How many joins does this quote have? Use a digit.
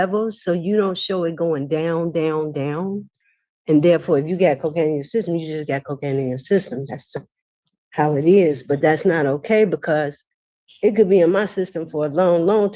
0